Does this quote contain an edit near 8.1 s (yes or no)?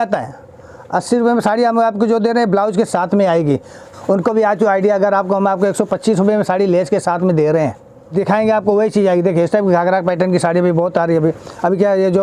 yes